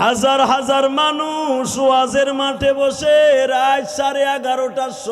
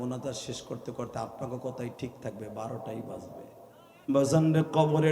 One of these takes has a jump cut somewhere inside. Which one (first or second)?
second